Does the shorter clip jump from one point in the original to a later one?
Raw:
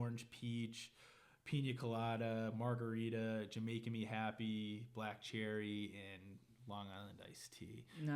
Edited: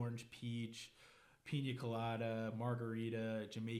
no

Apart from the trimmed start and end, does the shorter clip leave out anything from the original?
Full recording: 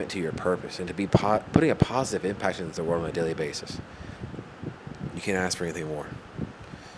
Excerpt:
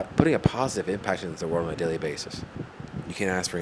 yes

